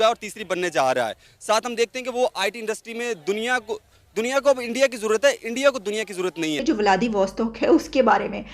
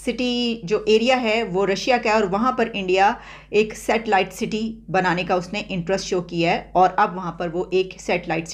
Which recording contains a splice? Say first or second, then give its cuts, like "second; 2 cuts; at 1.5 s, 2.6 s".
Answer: first; 1 cut; at 6.6 s